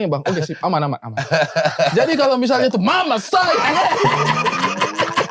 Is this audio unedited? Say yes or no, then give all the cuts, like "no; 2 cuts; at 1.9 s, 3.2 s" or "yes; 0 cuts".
yes; 0 cuts